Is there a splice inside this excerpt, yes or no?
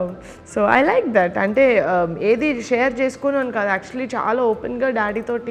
no